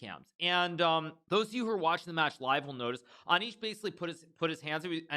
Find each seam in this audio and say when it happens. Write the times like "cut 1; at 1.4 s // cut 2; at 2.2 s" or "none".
cut 1; at 1.2 s